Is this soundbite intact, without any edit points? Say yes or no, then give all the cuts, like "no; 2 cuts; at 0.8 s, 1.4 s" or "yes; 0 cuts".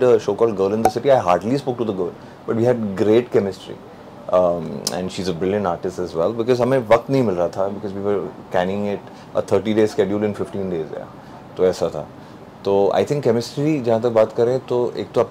yes; 0 cuts